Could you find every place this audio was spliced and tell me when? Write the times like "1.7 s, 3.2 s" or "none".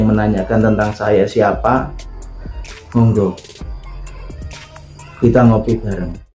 none

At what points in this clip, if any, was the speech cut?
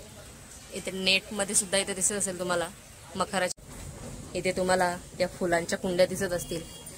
3.6 s

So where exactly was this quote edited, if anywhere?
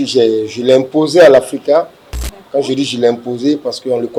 none

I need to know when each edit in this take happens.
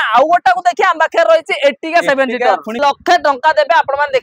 2.8 s

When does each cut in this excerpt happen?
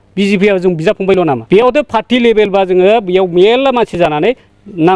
1.4 s

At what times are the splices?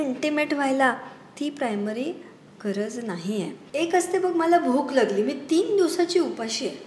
3.6 s

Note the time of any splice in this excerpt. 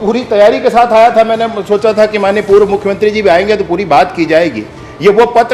none

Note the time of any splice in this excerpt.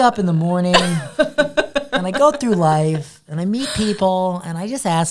none

